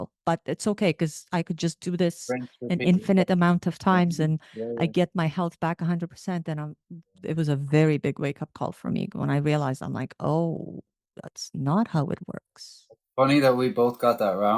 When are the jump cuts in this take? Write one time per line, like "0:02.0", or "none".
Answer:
none